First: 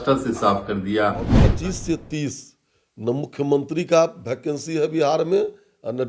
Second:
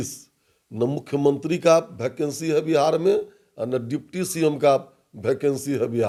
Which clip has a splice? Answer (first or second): first